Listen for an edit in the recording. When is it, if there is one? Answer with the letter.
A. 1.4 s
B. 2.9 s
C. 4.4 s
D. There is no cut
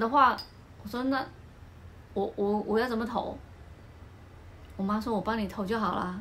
D